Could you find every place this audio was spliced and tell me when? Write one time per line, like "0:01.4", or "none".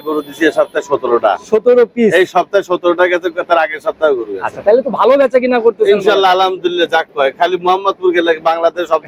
none